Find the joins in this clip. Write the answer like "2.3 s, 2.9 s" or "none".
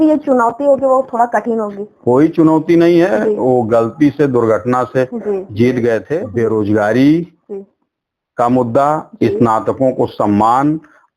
6.2 s